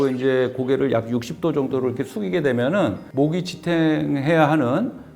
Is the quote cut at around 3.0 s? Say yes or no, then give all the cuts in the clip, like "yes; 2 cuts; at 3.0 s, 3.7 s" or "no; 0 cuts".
yes; 1 cut; at 3.0 s